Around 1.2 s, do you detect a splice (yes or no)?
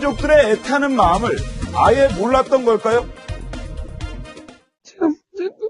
yes